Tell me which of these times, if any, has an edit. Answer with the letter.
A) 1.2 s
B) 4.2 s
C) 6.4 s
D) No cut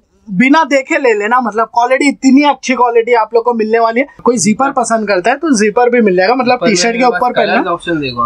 B